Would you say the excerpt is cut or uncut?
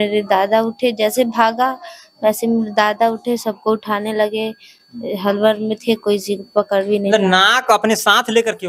uncut